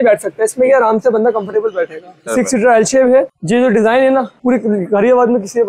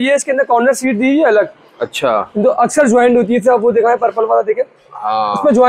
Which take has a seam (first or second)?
first